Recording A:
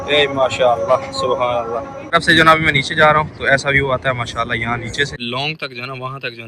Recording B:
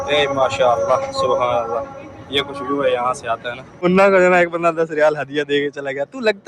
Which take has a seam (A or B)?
A